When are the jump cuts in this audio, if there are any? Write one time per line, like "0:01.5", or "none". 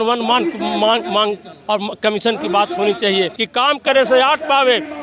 0:03.4